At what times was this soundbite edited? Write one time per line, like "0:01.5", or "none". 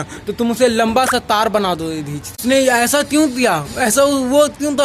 none